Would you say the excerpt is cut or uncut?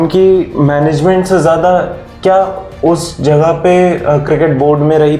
uncut